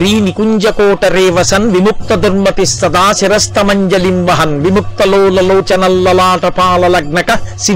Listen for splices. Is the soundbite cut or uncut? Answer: uncut